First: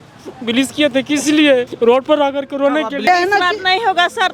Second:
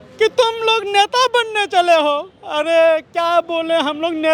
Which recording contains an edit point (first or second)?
first